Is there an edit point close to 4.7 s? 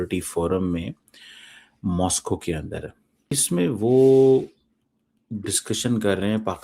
no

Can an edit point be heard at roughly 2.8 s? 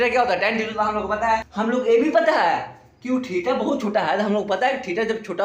no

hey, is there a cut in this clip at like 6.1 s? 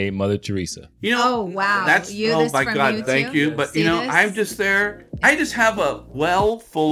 yes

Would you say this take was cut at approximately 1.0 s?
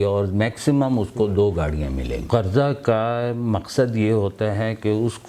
no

